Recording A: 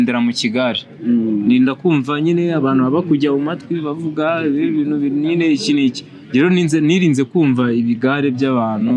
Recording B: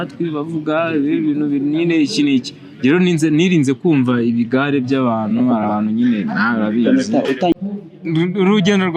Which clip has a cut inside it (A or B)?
B